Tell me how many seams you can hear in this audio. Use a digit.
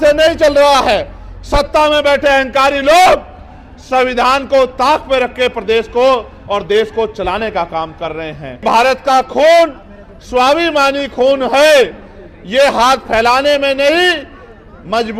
1